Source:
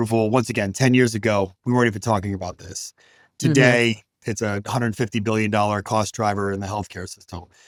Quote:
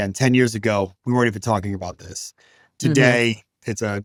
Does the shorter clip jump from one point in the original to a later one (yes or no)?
no